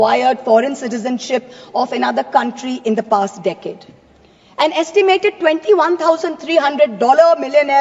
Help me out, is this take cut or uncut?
uncut